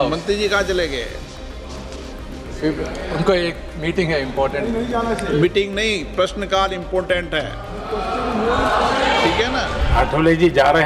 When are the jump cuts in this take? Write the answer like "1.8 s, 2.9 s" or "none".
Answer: 9.5 s